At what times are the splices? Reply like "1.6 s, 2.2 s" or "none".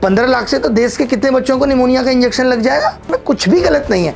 3.0 s